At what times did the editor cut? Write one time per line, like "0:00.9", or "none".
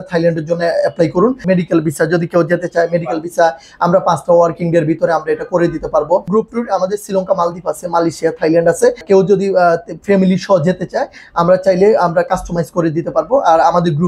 0:01.4
0:06.3
0:09.0